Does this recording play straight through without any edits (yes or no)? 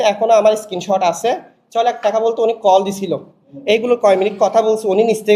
yes